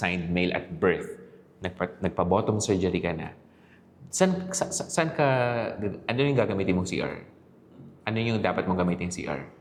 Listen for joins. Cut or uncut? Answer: uncut